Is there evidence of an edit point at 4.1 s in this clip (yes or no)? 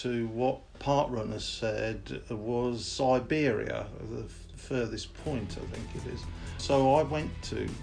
no